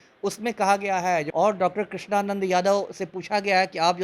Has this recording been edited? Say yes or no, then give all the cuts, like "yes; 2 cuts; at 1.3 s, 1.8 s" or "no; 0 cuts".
yes; 1 cut; at 1.3 s